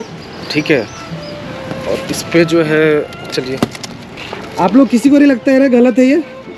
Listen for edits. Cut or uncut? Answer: uncut